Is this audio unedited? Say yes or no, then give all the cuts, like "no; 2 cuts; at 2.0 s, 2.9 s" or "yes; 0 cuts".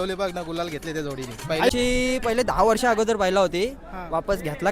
no; 1 cut; at 1.7 s